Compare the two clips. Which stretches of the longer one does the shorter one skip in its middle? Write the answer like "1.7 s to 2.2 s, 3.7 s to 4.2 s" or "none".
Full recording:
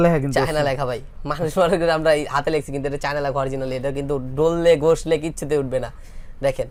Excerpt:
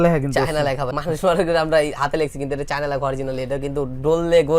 0.9 s to 1.2 s